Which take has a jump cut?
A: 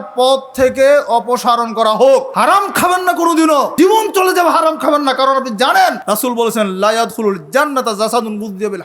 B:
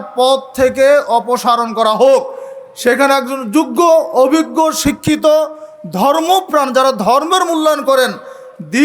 A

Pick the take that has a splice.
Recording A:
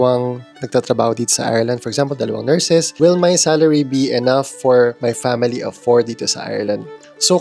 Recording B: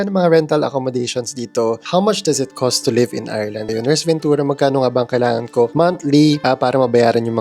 A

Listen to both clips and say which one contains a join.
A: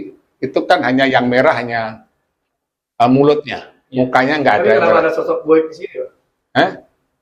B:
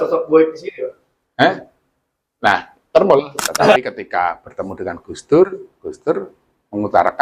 B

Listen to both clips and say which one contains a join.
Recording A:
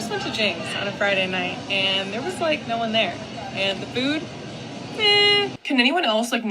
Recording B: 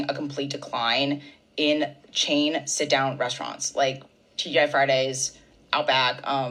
A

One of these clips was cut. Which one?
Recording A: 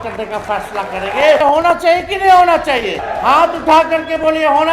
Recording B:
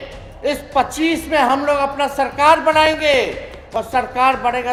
A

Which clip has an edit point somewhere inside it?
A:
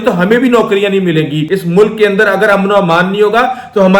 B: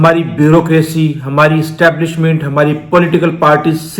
A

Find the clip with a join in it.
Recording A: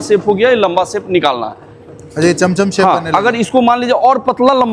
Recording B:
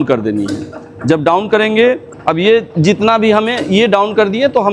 B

